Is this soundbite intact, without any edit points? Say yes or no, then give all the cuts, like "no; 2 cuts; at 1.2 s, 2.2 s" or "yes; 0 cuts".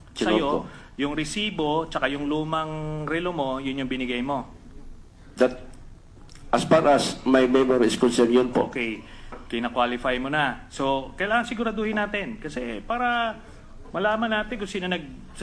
yes; 0 cuts